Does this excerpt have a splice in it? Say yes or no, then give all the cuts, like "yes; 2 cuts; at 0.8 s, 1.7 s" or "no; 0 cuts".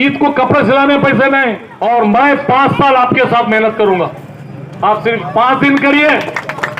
yes; 1 cut; at 1.6 s